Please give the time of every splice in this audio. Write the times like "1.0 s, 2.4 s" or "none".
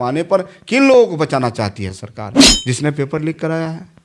none